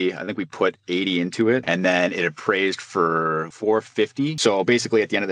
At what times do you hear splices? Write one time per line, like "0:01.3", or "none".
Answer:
0:03.4
0:04.4